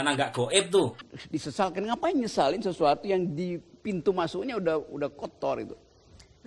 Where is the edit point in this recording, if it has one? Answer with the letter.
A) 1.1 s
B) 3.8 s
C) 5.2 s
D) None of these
A